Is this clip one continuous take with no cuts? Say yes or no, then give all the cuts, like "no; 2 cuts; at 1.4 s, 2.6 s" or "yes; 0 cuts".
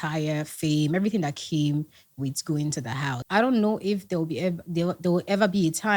no; 1 cut; at 3.1 s